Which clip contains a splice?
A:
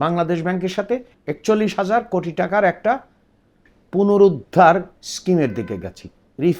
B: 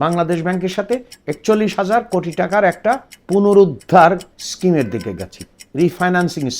B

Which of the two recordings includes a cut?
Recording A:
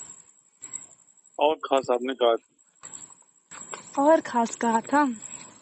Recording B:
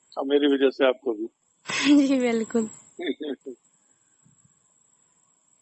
A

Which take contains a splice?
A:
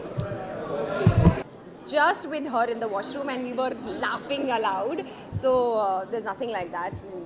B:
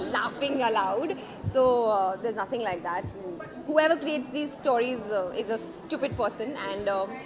A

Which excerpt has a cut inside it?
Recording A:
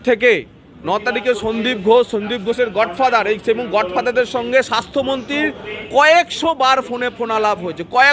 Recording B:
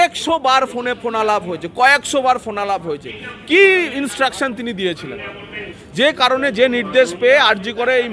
B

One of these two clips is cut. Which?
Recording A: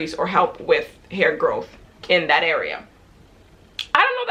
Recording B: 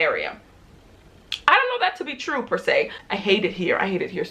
B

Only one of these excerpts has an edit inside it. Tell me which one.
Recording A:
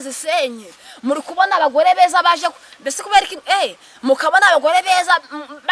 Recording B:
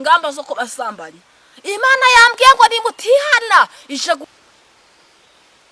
B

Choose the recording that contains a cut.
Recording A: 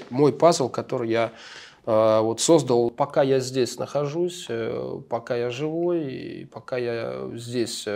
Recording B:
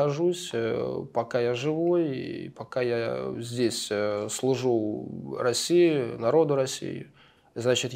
A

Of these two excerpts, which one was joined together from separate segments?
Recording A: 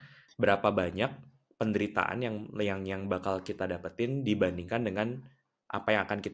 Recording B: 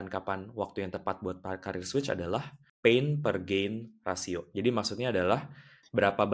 B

